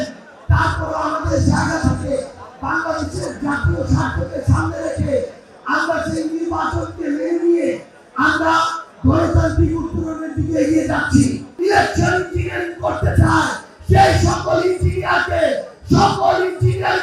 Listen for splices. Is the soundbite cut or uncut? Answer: cut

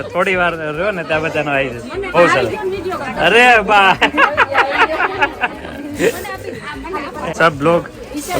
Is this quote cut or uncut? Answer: cut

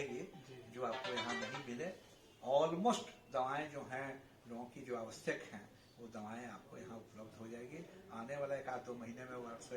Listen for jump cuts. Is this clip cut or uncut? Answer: uncut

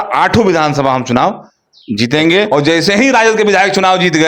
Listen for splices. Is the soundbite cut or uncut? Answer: cut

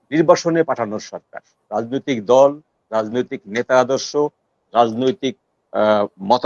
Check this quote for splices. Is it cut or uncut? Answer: uncut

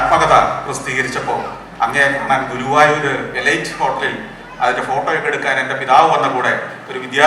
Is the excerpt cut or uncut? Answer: cut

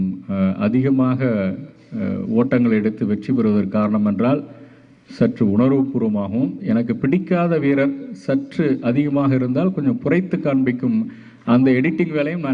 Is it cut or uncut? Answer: uncut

